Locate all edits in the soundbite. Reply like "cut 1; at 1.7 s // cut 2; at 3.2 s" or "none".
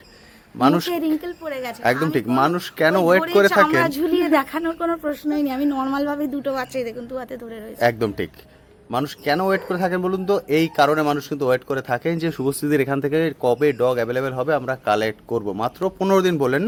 none